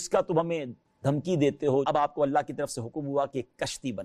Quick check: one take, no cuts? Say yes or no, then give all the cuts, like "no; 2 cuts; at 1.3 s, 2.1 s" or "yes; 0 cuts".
no; 1 cut; at 1.8 s